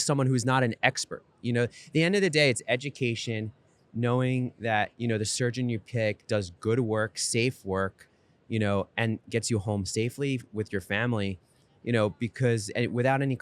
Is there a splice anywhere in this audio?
no; 0 cuts

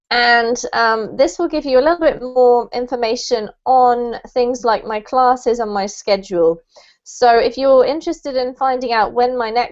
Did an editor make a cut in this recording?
no; 0 cuts

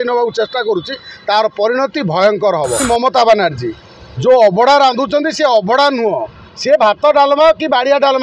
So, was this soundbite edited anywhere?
yes; 1 cut; at 2.8 s

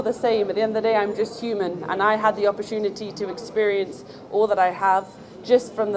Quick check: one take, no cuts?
yes; 0 cuts

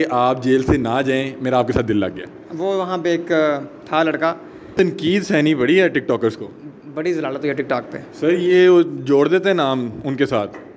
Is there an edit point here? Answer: yes; 1 cut; at 4.7 s

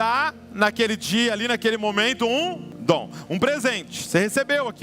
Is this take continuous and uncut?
no; 1 cut; at 2.7 s

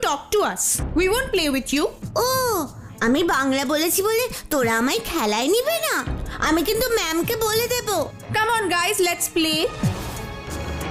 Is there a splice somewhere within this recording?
no; 0 cuts

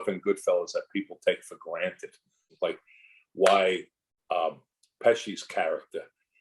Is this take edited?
yes; 1 cut; at 2.4 s

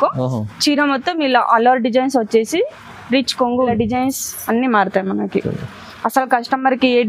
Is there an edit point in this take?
yes; 1 cut; at 3.7 s

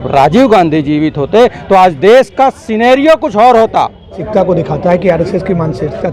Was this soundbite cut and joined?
yes; 1 cut; at 4.2 s

